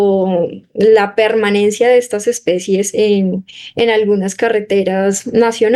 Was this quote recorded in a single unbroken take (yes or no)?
yes